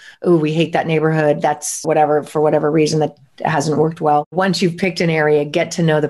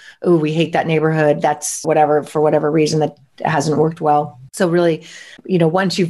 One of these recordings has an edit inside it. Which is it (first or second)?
first